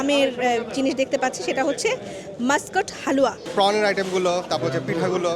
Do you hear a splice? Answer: yes; 1 cut; at 3.4 s

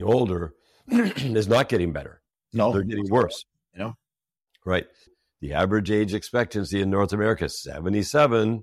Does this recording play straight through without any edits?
no; 1 cut; at 5.1 s

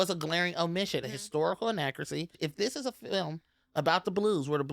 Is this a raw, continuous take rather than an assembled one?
no; 2 cuts; at 1.0 s, 2.3 s

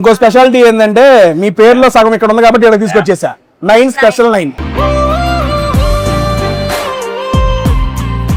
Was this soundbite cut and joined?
no; 0 cuts

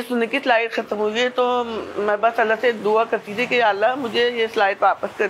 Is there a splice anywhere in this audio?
no; 0 cuts

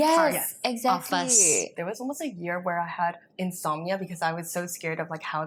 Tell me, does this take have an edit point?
yes; 1 cut; at 1.7 s

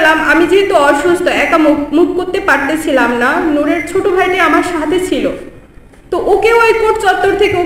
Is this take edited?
no; 0 cuts

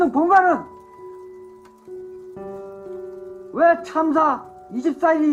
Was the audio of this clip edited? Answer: no; 0 cuts

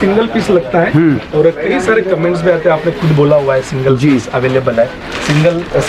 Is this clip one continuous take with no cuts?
yes; 0 cuts

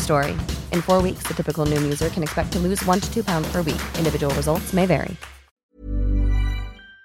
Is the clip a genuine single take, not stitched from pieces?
no; 1 cut; at 5.6 s

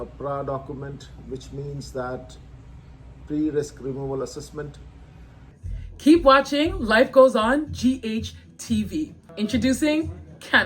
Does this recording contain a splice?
yes; 2 cuts; at 5.5 s, 9.2 s

